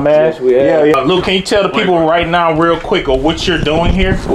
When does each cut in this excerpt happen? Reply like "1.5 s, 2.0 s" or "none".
0.9 s